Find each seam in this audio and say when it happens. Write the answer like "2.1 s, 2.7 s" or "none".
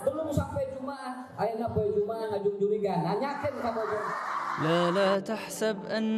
4.6 s